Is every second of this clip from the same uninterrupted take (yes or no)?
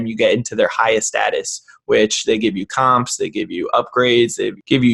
yes